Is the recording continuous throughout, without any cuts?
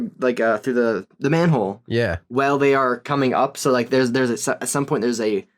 yes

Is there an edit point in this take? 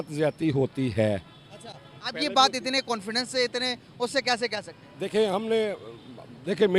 no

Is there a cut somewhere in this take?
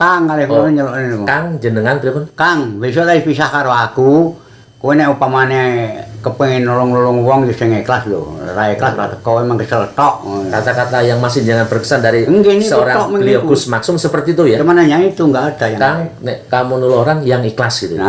no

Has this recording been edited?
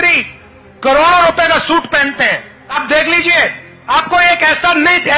yes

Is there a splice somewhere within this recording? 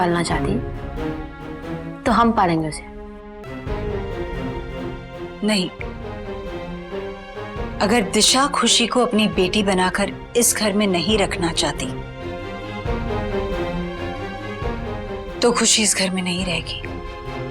yes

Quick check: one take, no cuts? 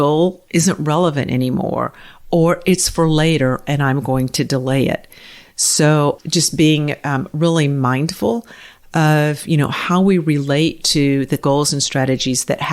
yes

